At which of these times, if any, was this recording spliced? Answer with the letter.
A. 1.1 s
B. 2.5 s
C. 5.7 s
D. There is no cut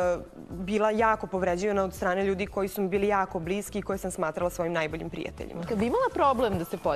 C